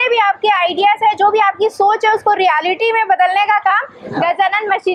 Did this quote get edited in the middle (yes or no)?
no